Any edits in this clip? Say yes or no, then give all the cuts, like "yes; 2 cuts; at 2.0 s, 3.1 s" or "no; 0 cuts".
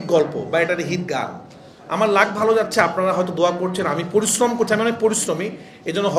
no; 0 cuts